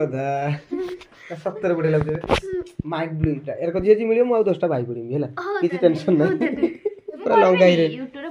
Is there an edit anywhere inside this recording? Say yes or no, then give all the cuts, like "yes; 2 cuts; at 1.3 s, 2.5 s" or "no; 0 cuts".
yes; 1 cut; at 7.2 s